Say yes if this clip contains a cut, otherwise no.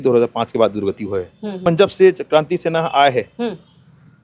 yes